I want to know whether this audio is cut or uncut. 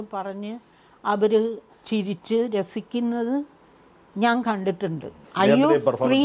cut